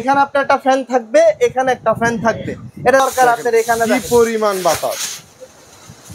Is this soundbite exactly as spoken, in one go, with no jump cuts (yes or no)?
no